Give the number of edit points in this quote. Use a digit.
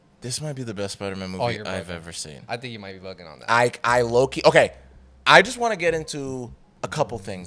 1